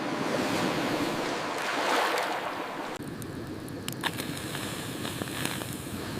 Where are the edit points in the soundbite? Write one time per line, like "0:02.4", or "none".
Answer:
0:03.0